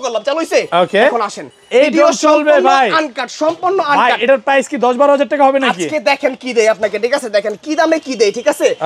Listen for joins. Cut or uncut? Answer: uncut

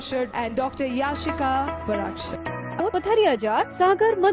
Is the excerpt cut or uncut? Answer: cut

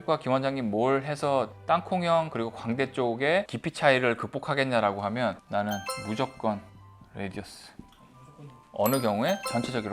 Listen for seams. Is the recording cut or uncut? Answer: uncut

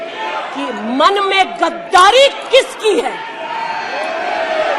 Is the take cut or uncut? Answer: uncut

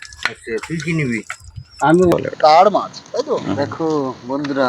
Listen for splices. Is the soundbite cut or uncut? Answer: cut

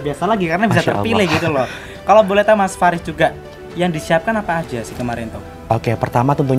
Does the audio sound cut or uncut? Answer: uncut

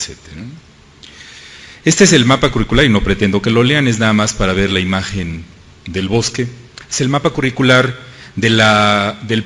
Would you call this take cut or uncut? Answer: uncut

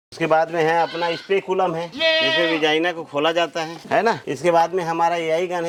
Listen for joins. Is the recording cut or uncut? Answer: uncut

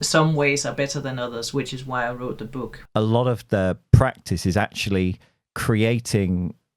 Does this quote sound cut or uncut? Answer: cut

